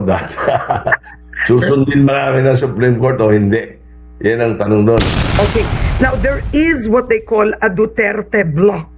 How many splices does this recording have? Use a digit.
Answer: 1